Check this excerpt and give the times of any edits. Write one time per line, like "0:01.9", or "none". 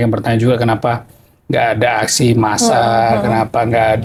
none